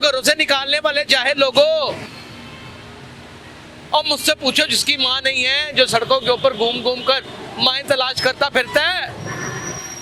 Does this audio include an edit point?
no; 0 cuts

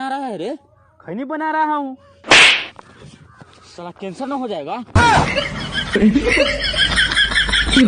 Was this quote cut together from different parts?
no; 0 cuts

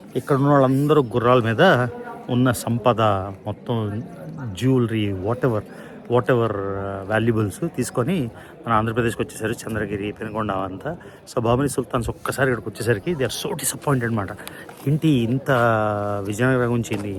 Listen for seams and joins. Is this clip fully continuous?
yes; 0 cuts

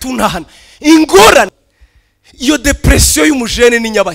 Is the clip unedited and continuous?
no; 1 cut; at 1.5 s

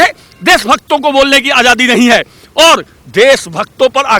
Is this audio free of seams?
yes; 0 cuts

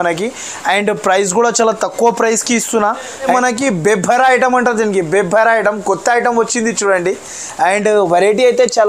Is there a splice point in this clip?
yes; 1 cut; at 3.3 s

